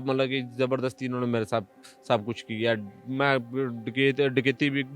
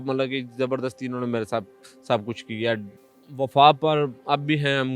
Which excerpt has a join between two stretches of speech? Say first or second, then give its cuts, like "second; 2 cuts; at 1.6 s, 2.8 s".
second; 1 cut; at 2.9 s